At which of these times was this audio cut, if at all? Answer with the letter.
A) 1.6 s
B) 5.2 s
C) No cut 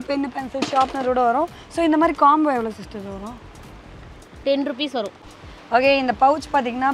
B